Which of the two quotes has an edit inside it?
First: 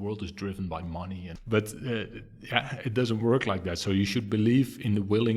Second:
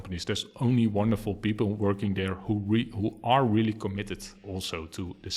first; 1 cut; at 1.3 s

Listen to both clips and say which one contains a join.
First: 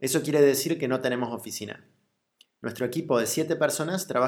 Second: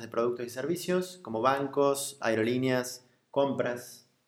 second; 1 cut; at 1.2 s

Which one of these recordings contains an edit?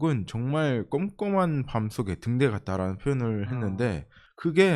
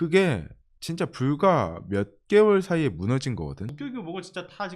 second; 1 cut; at 3.6 s

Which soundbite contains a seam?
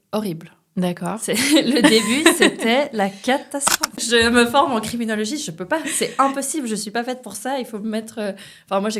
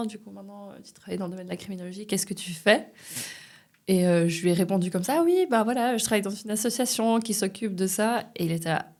first; 1 cut; at 3.9 s

